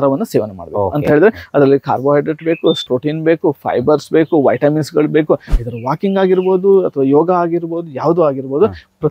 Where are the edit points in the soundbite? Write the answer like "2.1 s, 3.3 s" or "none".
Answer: 5.5 s